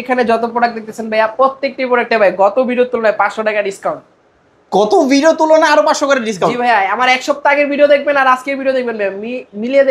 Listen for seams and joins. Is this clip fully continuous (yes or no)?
yes